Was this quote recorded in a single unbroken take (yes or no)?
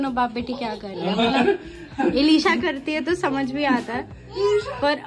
yes